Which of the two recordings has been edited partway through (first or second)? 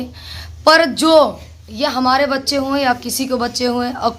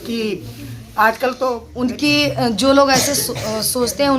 second